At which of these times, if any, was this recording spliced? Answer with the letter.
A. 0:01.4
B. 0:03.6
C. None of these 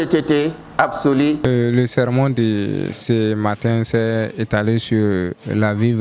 A